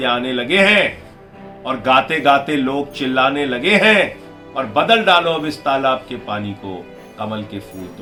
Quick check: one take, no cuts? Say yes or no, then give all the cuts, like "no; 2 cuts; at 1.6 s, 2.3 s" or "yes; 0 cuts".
yes; 0 cuts